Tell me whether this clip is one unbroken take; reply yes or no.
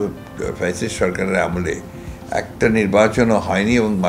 yes